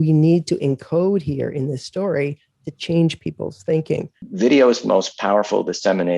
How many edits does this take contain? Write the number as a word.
one